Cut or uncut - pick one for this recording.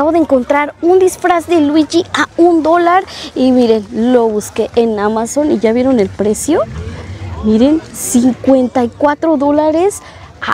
uncut